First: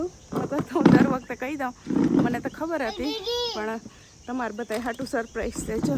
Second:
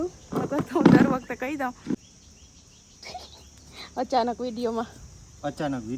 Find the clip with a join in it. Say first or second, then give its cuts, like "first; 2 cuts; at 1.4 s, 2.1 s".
second; 1 cut; at 2.0 s